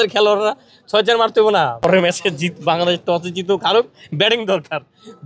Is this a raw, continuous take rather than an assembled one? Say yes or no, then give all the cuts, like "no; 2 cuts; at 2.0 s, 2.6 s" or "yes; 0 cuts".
no; 1 cut; at 1.8 s